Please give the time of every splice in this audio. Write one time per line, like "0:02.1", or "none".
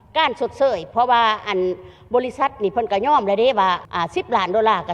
0:03.9